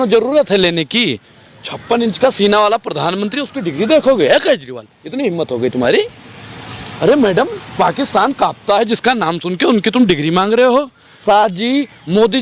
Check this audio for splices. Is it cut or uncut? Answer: cut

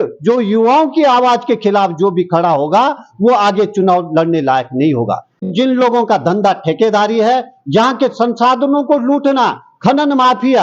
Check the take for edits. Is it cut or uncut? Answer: cut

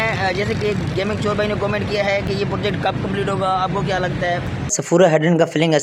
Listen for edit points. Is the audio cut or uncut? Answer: cut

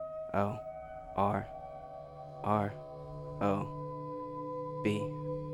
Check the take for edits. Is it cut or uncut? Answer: uncut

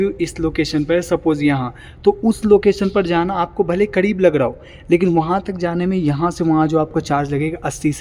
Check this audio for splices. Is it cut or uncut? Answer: uncut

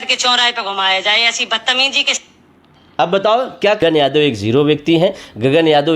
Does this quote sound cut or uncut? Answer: cut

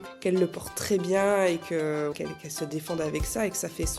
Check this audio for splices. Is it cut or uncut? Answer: cut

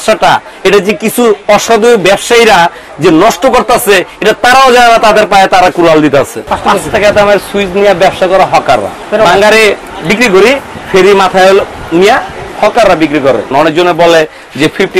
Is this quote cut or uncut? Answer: cut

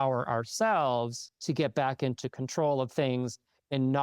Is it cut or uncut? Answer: cut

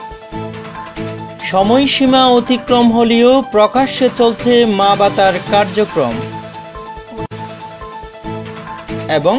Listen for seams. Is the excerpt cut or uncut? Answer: cut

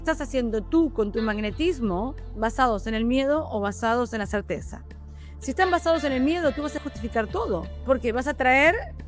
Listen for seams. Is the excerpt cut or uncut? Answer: cut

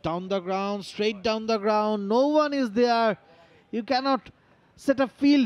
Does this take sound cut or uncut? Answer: uncut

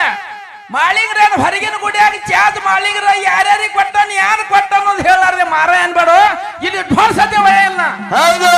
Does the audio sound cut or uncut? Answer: uncut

